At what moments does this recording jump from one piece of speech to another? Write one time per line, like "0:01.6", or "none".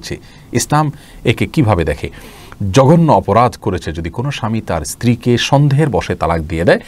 none